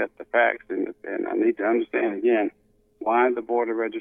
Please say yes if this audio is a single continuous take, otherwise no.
yes